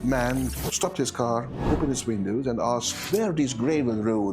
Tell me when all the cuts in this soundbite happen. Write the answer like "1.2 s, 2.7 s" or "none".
1.5 s, 2.9 s